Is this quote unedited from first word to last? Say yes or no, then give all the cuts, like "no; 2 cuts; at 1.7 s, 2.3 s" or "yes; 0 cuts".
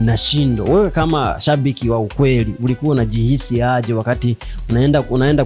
yes; 0 cuts